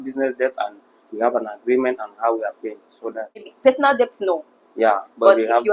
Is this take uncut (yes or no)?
no